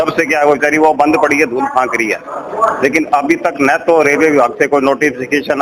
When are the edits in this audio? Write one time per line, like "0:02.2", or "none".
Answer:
none